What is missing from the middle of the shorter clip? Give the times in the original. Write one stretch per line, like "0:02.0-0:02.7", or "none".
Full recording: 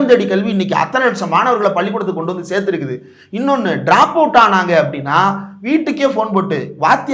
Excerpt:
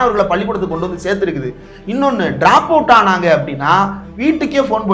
none